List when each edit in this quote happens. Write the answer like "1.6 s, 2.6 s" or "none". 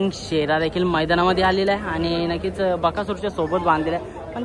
none